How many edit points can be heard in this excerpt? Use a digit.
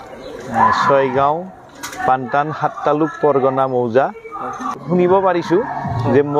1